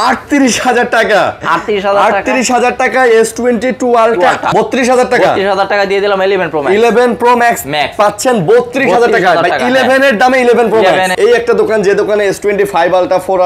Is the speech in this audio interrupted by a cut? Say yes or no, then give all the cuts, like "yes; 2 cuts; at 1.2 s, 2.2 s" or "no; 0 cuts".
yes; 2 cuts; at 4.5 s, 11.1 s